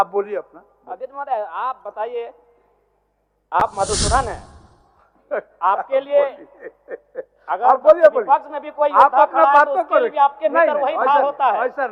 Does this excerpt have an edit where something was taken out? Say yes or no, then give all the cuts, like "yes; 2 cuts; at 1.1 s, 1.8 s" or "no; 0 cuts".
no; 0 cuts